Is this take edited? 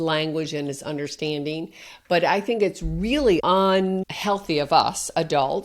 yes; 2 cuts; at 3.4 s, 4.1 s

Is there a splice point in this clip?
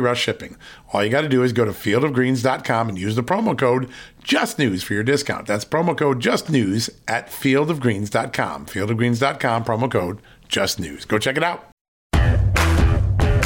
yes; 1 cut; at 12.0 s

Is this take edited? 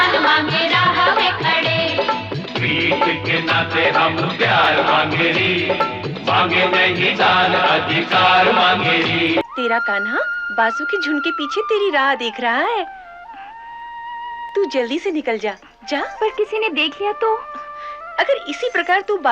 yes; 3 cuts; at 9.4 s, 14.5 s, 16.1 s

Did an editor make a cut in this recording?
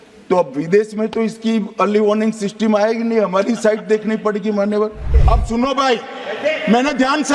yes; 1 cut; at 5.1 s

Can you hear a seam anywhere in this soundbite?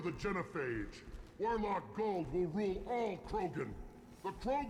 no; 0 cuts

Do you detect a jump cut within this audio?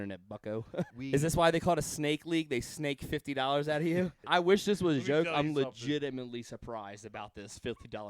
yes; 2 cuts; at 1.0 s, 4.2 s

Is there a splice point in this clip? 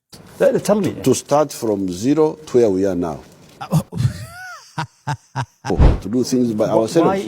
yes; 1 cut; at 5.7 s

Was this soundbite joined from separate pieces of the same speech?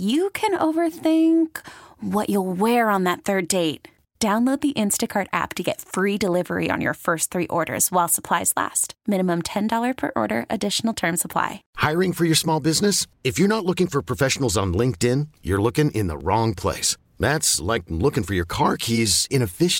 yes; 1 cut; at 11.6 s

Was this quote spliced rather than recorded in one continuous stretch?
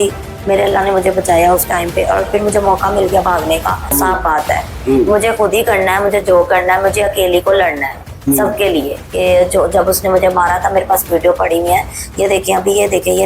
yes; 2 cuts; at 3.9 s, 9.0 s

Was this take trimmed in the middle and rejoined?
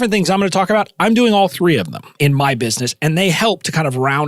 yes; 1 cut; at 2.1 s

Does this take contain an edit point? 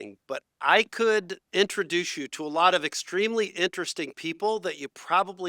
yes; 1 cut; at 1.4 s

